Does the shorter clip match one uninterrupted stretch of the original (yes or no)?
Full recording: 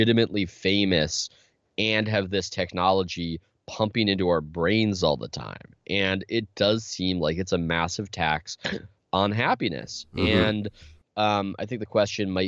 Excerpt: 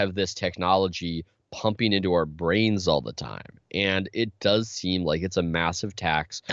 yes